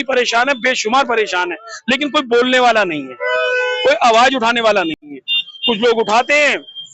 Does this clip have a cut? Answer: no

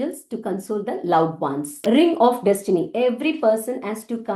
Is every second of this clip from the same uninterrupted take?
no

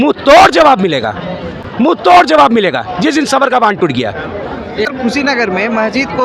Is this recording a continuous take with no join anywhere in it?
yes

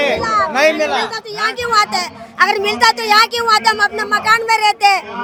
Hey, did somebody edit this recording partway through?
no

